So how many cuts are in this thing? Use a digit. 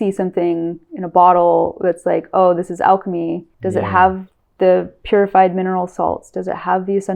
1